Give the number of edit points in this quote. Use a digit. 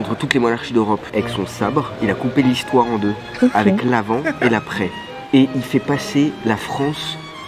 1